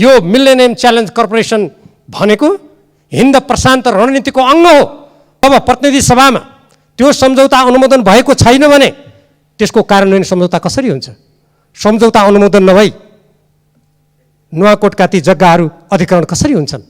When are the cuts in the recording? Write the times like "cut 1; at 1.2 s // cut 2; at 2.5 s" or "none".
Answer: cut 1; at 5.4 s

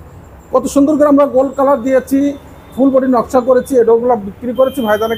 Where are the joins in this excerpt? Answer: none

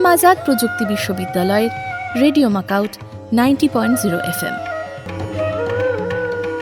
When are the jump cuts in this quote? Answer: cut 1; at 5.1 s

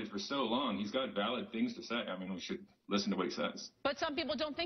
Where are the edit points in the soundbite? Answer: cut 1; at 3.7 s

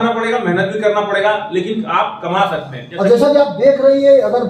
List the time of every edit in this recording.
cut 1; at 2.7 s

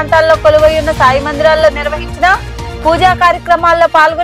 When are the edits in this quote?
none

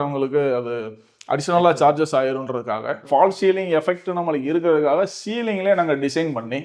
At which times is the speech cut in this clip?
cut 1; at 3.0 s

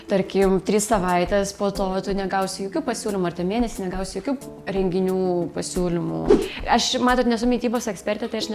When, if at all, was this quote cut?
cut 1; at 6.3 s

